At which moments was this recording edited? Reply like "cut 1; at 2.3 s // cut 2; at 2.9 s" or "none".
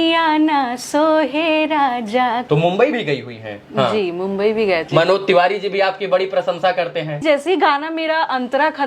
cut 1; at 2.4 s // cut 2; at 4.8 s // cut 3; at 7.2 s